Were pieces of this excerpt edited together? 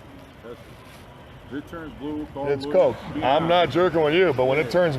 yes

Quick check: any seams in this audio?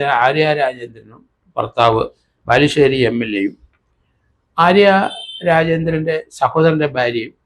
no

